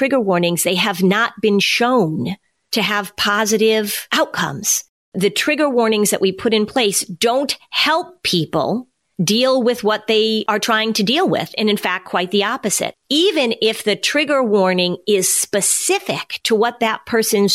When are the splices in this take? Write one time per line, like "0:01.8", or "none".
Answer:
0:04.0
0:09.0
0:10.4
0:16.3